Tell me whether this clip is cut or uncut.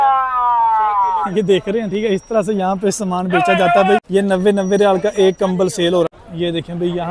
cut